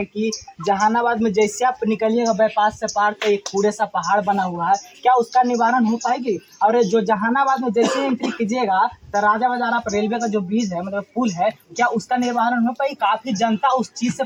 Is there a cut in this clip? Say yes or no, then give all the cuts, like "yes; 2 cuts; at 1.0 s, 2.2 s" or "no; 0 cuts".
no; 0 cuts